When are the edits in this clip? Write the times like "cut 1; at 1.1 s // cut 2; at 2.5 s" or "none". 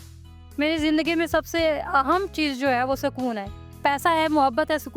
cut 1; at 3.6 s